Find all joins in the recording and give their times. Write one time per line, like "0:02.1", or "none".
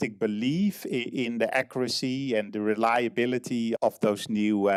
none